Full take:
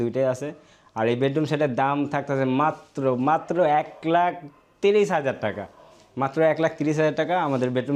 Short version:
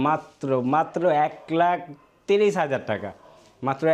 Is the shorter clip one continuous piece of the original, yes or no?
yes